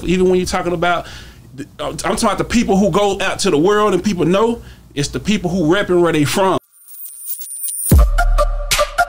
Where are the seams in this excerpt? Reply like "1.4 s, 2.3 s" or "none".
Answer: 6.8 s